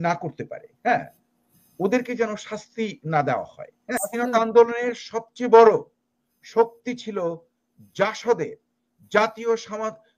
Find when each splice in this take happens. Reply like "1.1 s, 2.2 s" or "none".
4.0 s

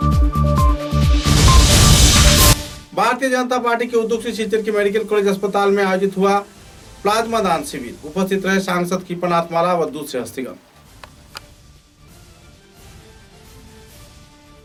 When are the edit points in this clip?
none

